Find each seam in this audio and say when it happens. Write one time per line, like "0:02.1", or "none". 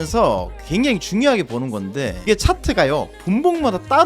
0:02.1